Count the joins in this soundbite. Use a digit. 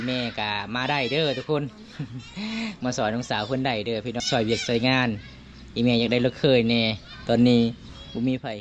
1